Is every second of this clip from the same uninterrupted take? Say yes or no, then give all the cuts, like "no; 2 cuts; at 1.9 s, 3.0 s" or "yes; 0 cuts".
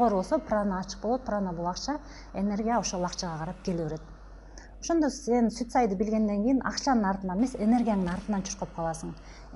yes; 0 cuts